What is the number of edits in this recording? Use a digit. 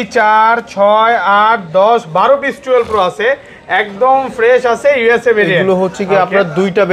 0